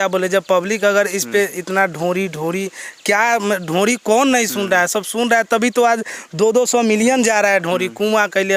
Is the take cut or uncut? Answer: uncut